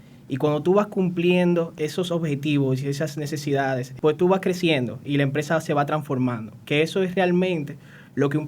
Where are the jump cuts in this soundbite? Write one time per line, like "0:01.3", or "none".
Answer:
0:01.7
0:03.9